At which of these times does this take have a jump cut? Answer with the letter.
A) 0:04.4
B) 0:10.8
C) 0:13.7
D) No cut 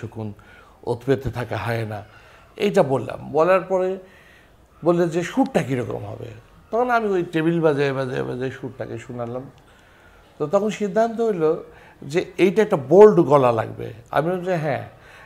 D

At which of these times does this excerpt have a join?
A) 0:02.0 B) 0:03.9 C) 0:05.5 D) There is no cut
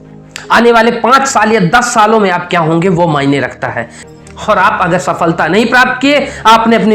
B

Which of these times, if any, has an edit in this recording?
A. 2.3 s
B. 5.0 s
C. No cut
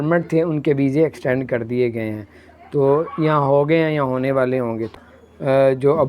B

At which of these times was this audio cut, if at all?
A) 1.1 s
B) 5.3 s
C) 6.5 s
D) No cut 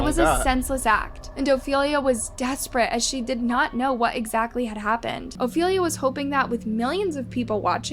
B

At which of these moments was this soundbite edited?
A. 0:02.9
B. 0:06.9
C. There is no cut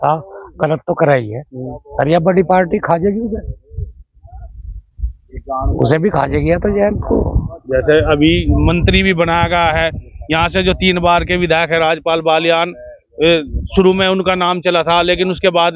C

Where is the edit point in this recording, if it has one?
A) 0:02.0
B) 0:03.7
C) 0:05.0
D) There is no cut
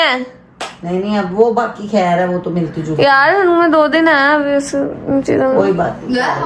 D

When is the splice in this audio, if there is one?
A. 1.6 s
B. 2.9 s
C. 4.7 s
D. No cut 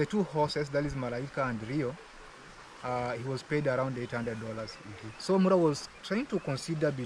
D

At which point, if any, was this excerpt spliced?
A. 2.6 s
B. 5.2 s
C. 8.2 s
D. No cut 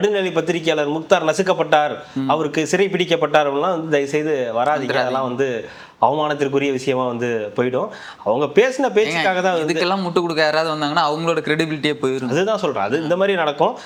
D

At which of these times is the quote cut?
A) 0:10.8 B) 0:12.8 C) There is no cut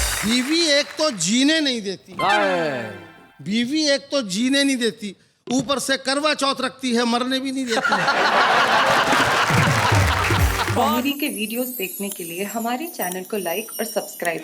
A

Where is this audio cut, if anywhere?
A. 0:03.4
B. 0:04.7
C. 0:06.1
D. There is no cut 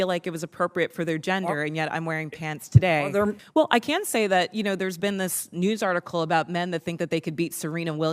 A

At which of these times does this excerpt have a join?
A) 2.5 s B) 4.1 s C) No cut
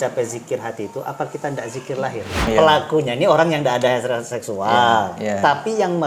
A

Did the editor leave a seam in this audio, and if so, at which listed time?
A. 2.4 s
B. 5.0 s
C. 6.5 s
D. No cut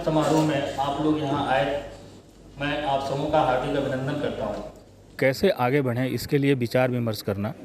B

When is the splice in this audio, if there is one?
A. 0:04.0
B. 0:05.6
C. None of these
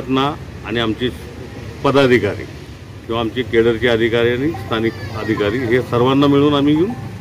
C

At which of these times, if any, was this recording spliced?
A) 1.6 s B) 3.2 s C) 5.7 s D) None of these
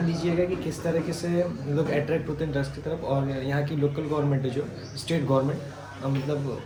D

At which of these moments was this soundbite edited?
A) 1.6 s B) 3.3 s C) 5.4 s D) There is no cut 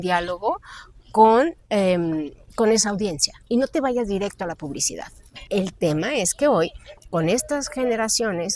C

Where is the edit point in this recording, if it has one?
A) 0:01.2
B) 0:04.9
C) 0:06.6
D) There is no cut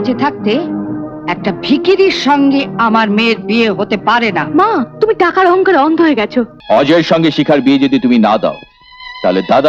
C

